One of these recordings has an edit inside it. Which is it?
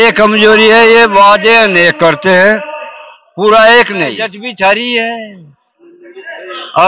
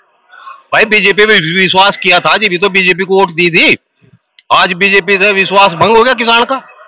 first; 1 cut; at 4.4 s

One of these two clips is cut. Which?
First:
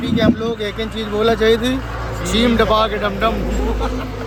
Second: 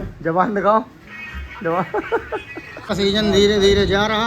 second; 1 cut; at 2.9 s

